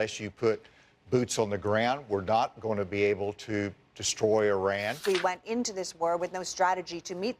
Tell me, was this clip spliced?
yes; 1 cut; at 5.0 s

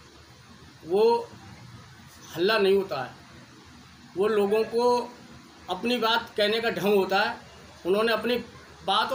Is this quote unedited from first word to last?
yes; 0 cuts

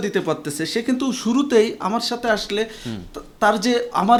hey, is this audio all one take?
yes; 0 cuts

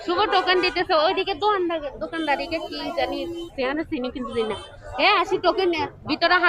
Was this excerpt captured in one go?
yes; 0 cuts

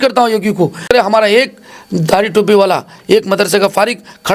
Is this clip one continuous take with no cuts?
no; 1 cut; at 0.9 s

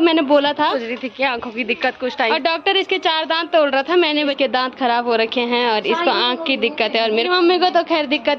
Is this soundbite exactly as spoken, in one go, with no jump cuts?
no; 4 cuts; at 0.8 s, 2.3 s, 4.3 s, 7.3 s

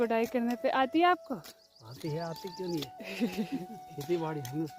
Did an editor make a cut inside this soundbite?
no; 0 cuts

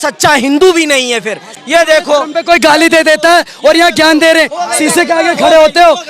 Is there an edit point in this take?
yes; 1 cut; at 1.5 s

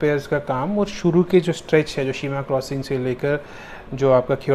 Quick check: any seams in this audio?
no; 0 cuts

